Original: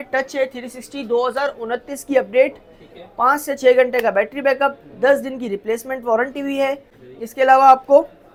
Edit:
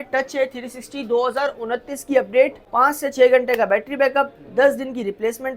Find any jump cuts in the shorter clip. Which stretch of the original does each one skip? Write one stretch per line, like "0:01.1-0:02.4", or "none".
0:02.6-0:03.1